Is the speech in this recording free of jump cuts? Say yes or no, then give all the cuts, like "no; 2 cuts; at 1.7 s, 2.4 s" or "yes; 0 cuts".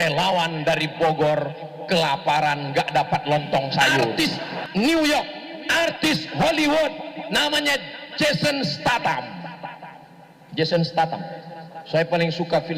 no; 1 cut; at 4.1 s